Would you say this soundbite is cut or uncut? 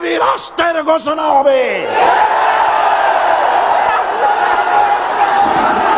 uncut